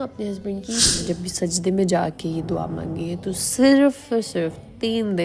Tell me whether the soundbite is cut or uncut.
cut